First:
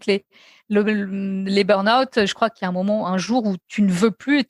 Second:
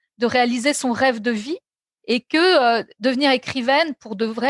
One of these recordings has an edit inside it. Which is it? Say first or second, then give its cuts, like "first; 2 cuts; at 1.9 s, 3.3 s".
first; 2 cuts; at 2.5 s, 3.6 s